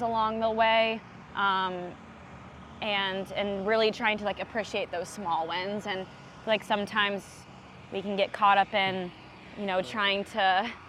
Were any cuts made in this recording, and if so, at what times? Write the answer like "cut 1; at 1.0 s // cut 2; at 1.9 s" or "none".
none